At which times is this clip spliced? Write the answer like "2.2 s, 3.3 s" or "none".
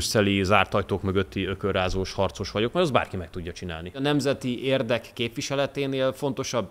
4.0 s